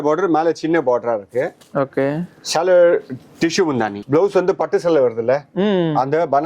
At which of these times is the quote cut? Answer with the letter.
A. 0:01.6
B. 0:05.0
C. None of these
C